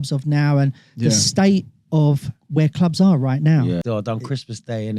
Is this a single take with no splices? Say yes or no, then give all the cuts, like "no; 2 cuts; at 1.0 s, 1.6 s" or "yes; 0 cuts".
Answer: no; 1 cut; at 3.8 s